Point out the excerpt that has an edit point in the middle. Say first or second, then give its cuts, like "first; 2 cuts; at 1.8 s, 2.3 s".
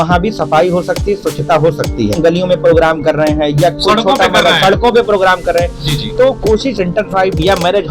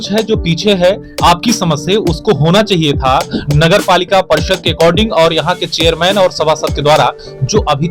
first; 1 cut; at 2.1 s